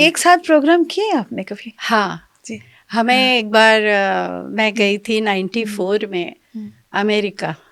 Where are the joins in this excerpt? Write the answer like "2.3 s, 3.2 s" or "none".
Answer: none